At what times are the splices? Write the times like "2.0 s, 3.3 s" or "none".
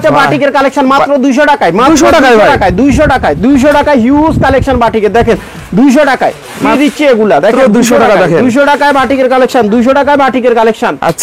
none